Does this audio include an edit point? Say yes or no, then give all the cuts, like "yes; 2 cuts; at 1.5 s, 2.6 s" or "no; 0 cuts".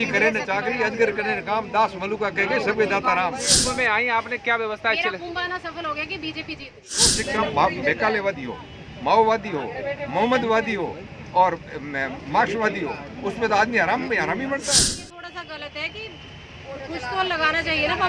yes; 3 cuts; at 3.6 s, 7.2 s, 14.8 s